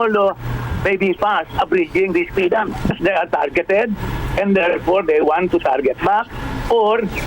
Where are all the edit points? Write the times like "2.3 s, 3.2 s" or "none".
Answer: 2.9 s